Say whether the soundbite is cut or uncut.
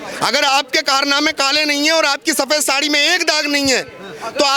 uncut